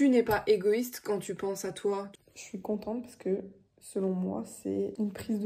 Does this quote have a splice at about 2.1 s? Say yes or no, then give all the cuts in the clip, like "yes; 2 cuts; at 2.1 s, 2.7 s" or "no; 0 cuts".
yes; 1 cut; at 2.1 s